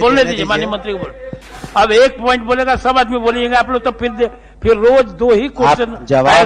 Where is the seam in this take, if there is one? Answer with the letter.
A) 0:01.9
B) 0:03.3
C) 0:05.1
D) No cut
D